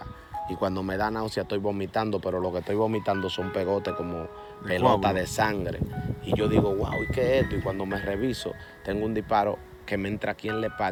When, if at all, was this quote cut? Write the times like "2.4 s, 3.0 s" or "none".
none